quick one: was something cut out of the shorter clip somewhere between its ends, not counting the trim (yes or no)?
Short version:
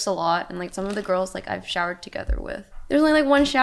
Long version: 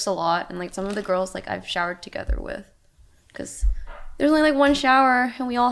yes